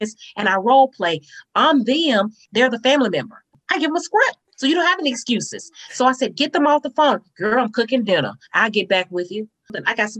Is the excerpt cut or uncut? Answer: uncut